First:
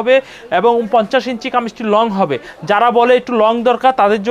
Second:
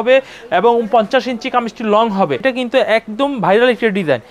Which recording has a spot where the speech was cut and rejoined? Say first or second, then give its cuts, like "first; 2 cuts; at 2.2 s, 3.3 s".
second; 1 cut; at 2.4 s